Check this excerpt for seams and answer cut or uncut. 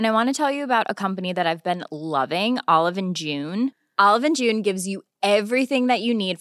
uncut